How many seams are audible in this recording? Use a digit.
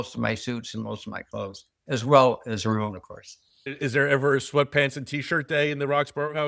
1